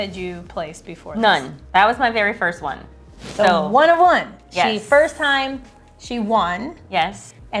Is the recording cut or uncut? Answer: uncut